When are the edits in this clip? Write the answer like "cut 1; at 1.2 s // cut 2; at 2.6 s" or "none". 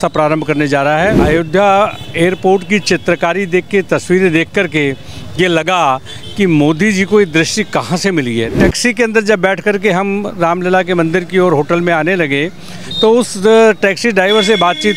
cut 1; at 1.2 s // cut 2; at 8.5 s